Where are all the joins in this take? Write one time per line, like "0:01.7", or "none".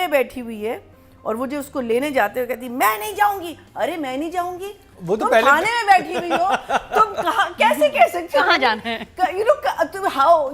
none

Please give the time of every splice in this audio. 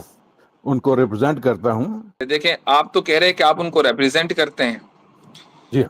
0:02.2

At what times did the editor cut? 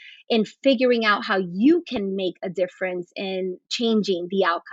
none

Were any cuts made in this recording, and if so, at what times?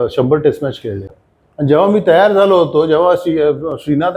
0:01.1

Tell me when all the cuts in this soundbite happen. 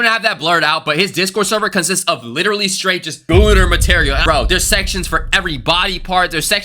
0:04.2

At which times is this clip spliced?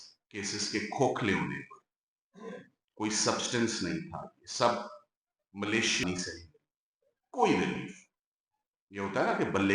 0:06.0

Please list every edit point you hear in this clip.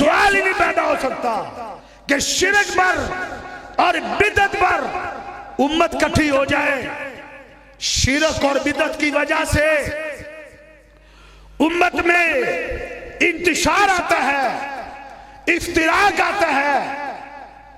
none

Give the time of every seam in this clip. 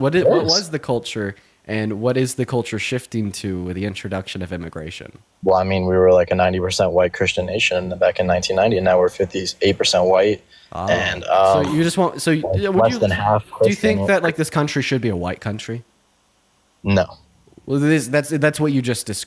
none

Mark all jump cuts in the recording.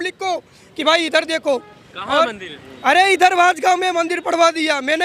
none

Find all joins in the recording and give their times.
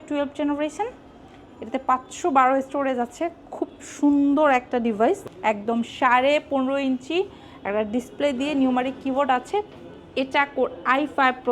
0:05.3

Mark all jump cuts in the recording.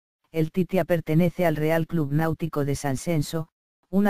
none

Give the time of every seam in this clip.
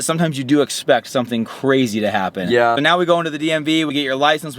0:02.8

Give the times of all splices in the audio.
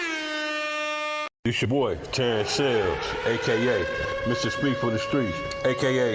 0:01.6

